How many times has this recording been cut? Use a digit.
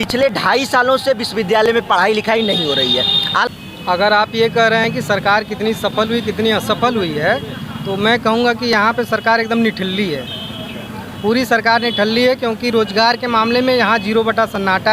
1